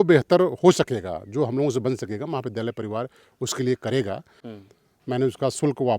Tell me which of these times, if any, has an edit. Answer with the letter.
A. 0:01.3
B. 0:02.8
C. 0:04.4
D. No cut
C